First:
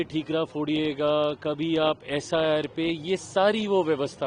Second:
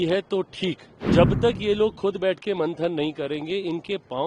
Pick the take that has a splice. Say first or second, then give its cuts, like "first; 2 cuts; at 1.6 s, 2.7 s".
second; 1 cut; at 0.9 s